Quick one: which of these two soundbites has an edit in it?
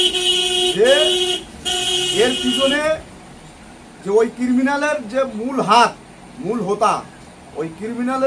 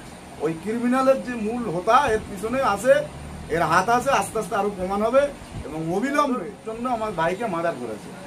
second; 1 cut; at 6.6 s

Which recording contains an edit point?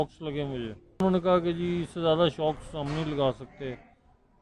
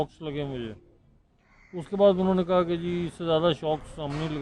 first; 1 cut; at 1.0 s

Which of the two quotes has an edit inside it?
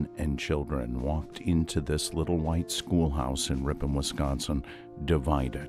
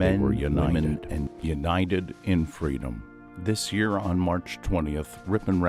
second; 1 cut; at 1.3 s

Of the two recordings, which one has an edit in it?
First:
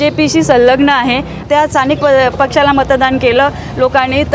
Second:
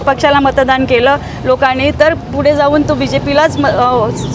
first; 1 cut; at 1.3 s

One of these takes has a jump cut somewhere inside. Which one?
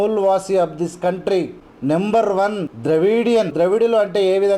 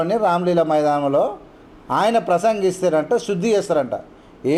first; 3 cuts; at 1.6 s, 2.7 s, 3.5 s

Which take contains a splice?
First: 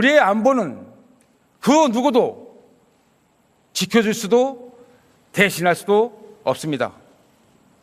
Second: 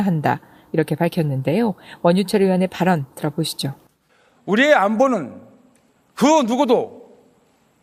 first; 1 cut; at 6.1 s

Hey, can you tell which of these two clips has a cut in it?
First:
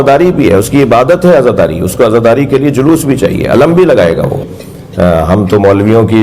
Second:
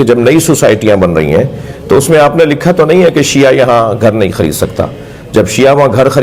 first; 1 cut; at 4.5 s

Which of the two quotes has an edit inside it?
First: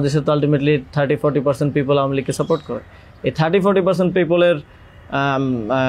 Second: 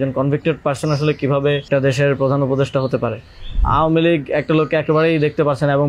second; 2 cuts; at 1.7 s, 3.6 s

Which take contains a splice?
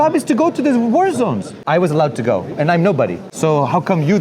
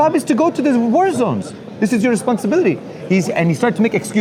first; 2 cuts; at 1.5 s, 3.2 s

